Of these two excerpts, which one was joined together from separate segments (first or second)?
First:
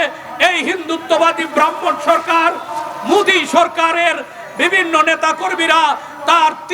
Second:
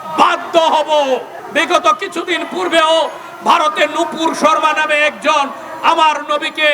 second